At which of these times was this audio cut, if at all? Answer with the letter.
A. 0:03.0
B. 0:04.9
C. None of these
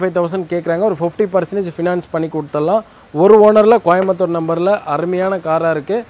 C